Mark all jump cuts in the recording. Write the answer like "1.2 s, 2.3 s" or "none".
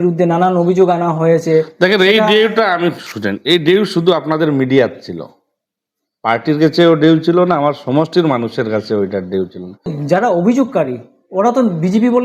10.0 s